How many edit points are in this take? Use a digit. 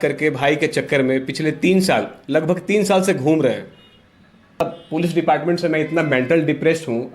1